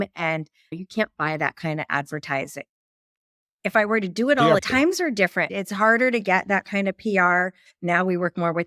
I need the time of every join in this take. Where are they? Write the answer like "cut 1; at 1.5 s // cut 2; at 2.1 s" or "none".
cut 1; at 4.6 s